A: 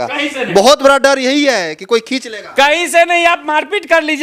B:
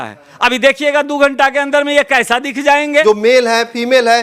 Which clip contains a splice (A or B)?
B